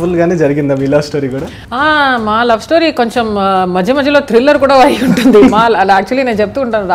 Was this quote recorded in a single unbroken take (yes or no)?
no